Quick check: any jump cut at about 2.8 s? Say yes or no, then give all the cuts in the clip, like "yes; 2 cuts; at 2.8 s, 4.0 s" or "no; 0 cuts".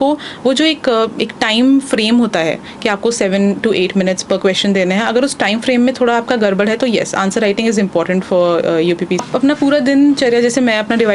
no; 1 cut; at 9.2 s